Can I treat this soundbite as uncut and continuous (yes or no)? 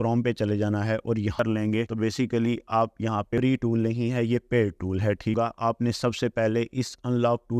no